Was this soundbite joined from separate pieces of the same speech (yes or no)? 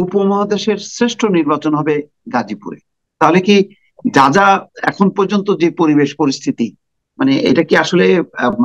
no